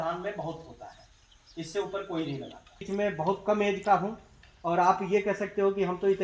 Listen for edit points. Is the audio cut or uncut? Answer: cut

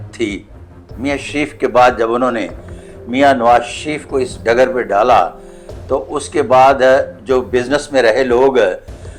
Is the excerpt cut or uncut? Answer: uncut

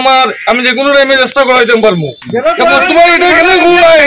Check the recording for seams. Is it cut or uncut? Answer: cut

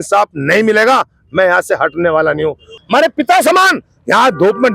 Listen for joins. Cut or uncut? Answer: cut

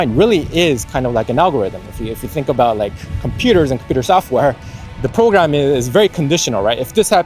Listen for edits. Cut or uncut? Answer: uncut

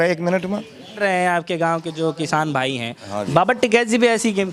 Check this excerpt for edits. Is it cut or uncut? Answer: cut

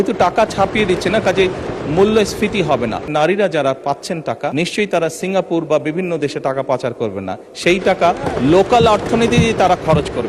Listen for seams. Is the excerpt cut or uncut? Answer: cut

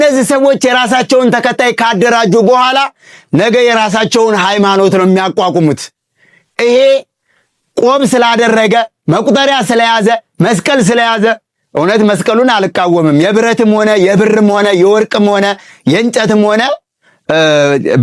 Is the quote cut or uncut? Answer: uncut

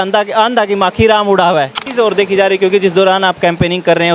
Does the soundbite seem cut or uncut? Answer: cut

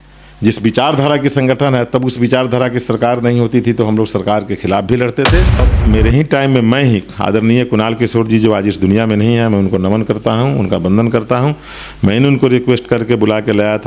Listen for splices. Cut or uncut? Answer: cut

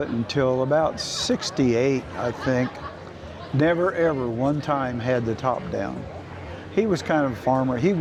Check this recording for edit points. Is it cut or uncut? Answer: uncut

